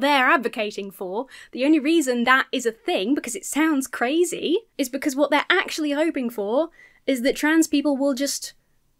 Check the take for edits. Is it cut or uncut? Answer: cut